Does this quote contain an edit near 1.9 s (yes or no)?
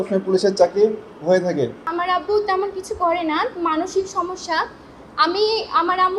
yes